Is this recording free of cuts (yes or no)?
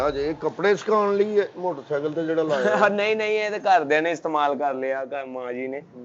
yes